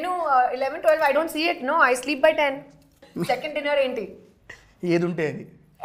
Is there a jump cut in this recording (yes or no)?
yes